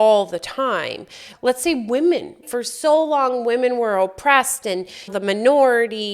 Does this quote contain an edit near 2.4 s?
yes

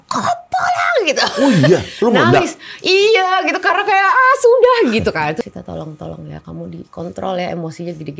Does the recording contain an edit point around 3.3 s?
no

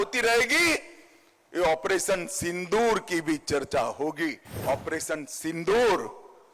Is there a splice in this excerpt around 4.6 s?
yes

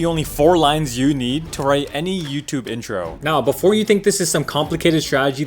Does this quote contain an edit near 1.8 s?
no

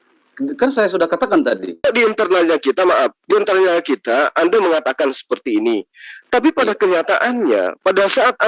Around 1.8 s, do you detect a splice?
yes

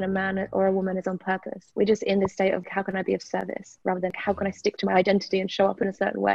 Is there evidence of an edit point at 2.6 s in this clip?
yes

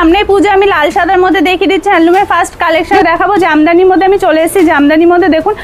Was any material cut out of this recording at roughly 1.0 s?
no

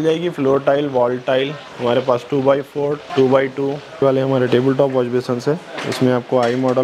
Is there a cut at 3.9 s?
yes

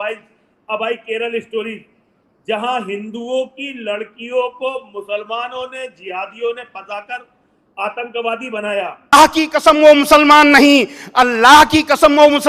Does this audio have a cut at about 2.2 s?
no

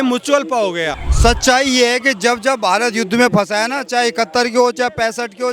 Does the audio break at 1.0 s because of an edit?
yes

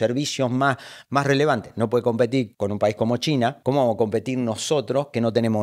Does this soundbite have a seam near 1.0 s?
no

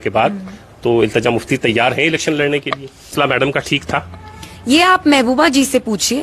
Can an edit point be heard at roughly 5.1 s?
no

